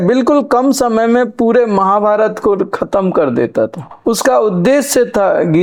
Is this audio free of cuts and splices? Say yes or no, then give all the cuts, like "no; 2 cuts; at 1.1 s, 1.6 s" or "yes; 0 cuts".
yes; 0 cuts